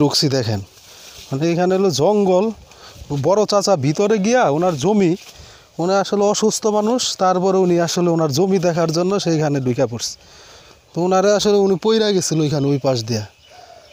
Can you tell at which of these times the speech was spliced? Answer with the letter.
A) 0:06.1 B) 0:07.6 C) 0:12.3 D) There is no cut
D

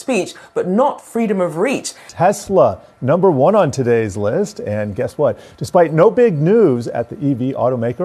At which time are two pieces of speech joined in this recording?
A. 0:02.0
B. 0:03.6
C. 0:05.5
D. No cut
A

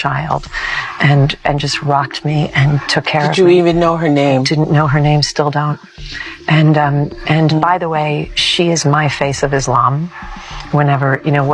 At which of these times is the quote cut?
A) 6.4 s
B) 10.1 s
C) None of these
C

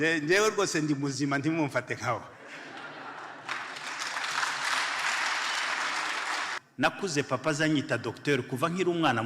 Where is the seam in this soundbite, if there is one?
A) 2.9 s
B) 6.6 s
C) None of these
B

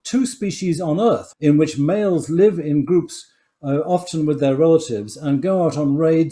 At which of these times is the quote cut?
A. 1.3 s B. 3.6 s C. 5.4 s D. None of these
A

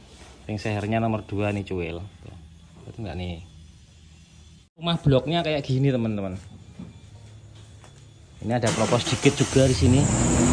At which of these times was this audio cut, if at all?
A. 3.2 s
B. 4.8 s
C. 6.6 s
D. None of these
B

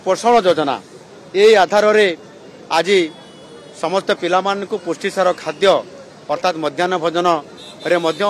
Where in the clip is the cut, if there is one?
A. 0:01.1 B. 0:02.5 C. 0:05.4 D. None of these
D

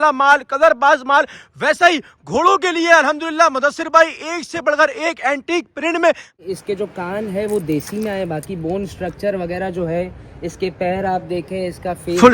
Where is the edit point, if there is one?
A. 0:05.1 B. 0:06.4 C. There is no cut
B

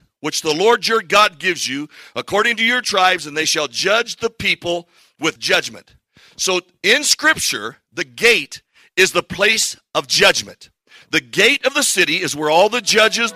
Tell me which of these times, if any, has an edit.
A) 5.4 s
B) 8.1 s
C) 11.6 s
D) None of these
A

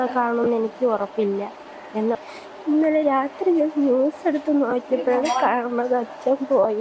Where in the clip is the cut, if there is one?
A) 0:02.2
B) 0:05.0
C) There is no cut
A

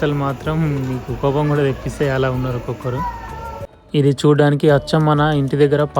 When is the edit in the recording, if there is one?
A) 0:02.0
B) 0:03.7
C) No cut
B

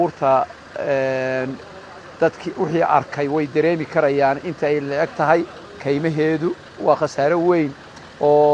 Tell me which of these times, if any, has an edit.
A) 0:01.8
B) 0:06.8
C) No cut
B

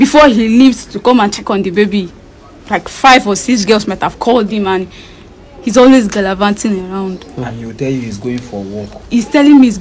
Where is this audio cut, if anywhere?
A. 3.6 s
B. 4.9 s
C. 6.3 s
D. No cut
D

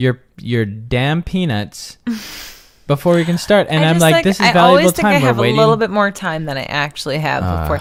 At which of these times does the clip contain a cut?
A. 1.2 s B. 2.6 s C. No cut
C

